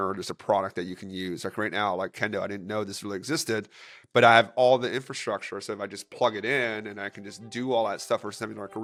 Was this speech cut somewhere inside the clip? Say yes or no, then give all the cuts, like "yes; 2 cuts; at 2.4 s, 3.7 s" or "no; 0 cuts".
no; 0 cuts